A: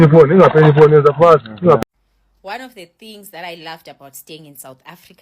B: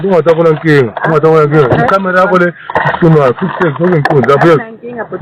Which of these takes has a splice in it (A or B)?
A